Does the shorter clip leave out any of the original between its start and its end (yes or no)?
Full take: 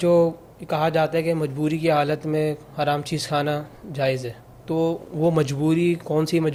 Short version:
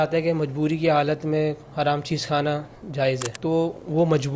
yes